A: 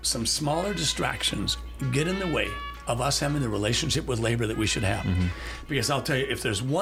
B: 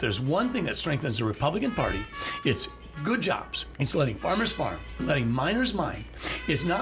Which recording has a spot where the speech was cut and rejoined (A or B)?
B